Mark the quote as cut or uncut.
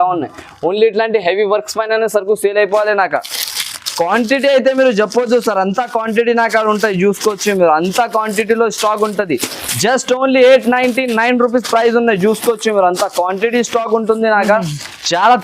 uncut